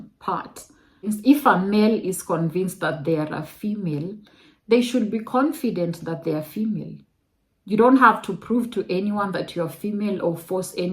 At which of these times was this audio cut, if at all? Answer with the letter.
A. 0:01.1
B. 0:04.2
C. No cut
A